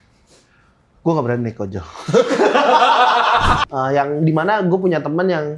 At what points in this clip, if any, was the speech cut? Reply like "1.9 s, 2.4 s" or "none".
3.6 s